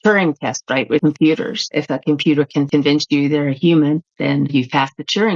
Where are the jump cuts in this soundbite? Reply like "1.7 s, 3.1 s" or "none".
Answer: 1.0 s, 1.6 s, 2.7 s